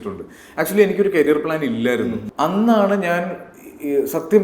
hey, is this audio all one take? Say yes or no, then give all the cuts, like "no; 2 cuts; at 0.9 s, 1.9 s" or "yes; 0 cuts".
no; 1 cut; at 2.2 s